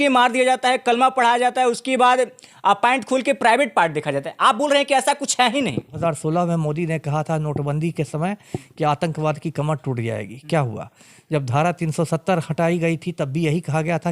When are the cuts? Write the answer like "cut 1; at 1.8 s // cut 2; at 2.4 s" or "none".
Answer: cut 1; at 6.0 s